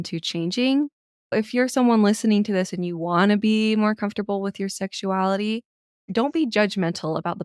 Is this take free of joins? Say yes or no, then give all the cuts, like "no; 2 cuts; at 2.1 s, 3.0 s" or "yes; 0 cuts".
no; 1 cut; at 1.3 s